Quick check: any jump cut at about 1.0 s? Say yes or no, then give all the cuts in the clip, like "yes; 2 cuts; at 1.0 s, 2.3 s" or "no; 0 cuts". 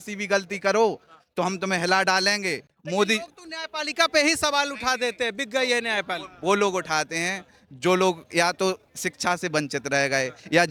no; 0 cuts